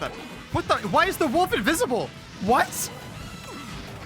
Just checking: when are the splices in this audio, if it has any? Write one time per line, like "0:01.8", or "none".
none